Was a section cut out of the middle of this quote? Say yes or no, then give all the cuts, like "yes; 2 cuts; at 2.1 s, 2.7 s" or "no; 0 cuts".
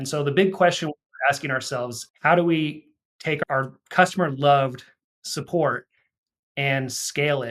yes; 2 cuts; at 2.0 s, 3.4 s